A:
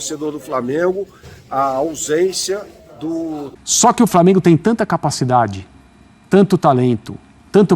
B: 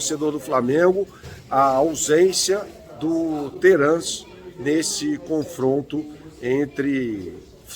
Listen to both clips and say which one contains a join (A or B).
A